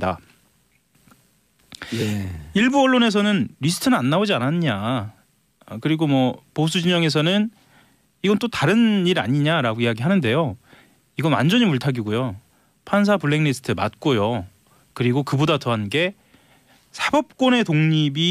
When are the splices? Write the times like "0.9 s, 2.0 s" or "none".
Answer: 16.9 s

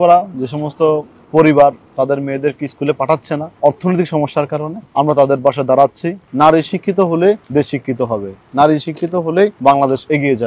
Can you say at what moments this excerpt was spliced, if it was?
3.5 s, 4.8 s, 6.2 s, 7.4 s, 9.6 s

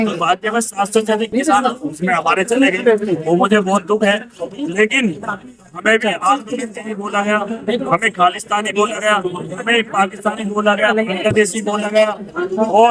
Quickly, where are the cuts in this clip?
none

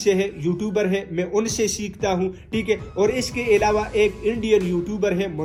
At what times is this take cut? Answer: none

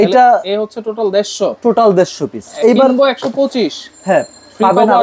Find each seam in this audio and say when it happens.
none

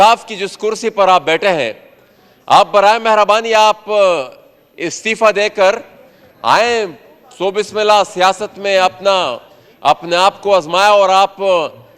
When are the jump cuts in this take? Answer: none

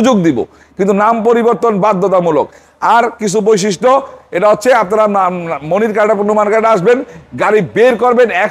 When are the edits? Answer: none

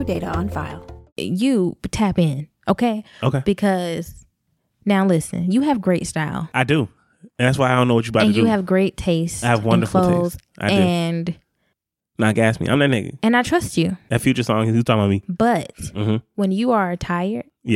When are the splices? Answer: 1.1 s

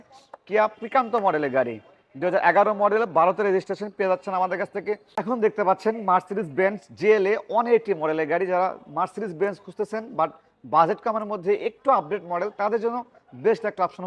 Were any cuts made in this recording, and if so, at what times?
5.1 s

